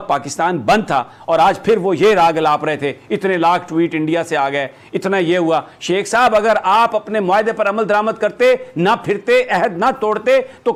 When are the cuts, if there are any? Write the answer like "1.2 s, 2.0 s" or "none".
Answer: none